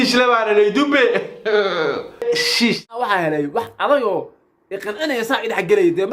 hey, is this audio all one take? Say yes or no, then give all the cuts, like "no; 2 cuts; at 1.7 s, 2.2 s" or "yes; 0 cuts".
no; 1 cut; at 2.8 s